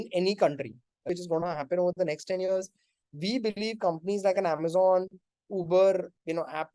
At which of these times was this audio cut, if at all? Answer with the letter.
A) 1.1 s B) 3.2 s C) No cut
A